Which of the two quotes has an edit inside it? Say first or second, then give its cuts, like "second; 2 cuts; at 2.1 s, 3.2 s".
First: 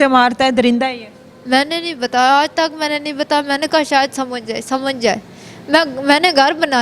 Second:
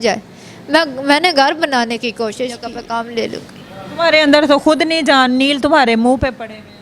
second; 1 cut; at 2.8 s